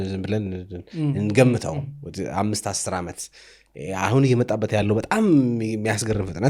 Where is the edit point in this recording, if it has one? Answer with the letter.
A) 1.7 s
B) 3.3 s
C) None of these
C